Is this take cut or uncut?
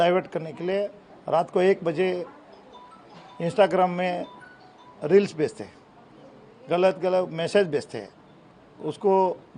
uncut